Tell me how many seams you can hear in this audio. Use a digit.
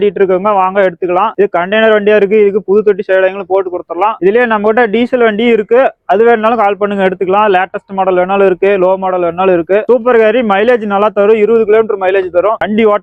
0